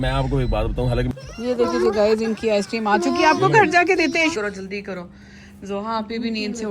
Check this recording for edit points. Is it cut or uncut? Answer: cut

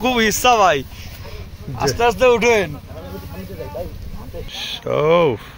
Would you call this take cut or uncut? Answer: cut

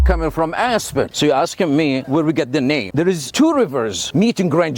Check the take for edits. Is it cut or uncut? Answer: cut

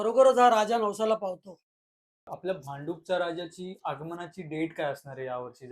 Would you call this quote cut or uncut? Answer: cut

